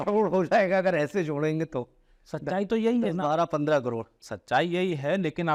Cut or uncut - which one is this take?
uncut